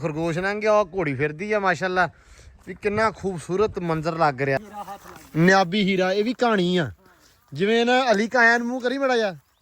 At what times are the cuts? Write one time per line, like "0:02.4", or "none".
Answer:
0:04.7